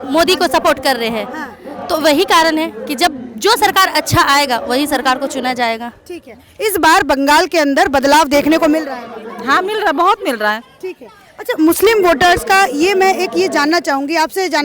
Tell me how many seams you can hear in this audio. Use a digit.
0